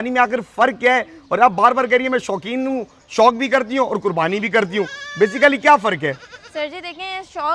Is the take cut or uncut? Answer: uncut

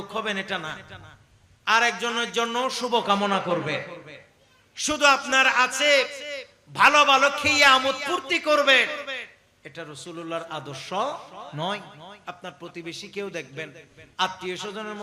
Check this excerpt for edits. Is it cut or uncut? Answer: uncut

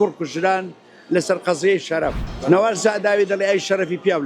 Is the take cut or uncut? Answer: cut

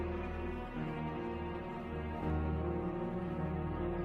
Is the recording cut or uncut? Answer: cut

